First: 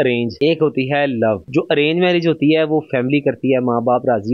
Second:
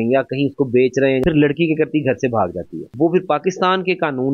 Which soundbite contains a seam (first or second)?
second